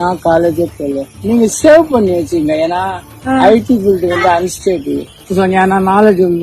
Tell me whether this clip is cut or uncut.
cut